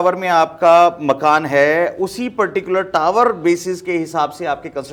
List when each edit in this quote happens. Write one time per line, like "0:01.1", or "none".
none